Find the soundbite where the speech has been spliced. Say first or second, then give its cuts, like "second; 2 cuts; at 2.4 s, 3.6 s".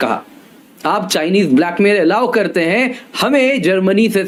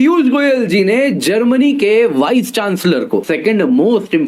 second; 1 cut; at 3.3 s